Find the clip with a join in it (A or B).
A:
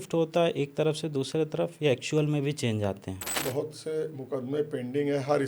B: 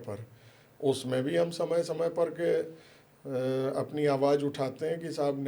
A